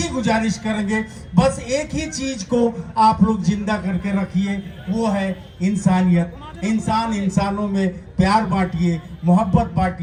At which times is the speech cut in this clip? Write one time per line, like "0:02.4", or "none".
none